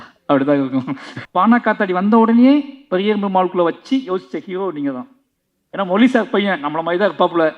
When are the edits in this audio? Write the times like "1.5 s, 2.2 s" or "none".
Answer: 1.1 s